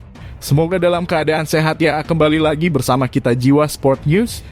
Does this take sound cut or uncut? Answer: uncut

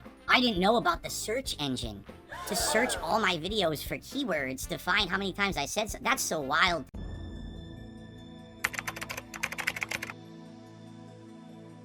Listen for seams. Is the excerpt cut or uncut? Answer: cut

